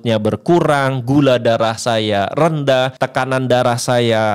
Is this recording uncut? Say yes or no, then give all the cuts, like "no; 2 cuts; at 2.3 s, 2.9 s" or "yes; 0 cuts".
no; 1 cut; at 3.0 s